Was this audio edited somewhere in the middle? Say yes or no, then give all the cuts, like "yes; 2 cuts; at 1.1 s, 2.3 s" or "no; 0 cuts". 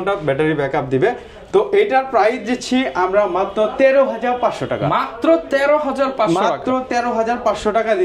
no; 0 cuts